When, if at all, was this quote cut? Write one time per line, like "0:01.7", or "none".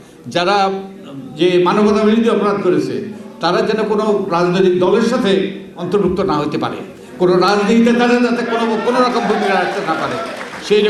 none